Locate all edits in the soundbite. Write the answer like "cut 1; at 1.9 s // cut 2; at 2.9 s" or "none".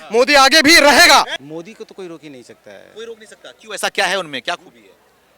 cut 1; at 1.4 s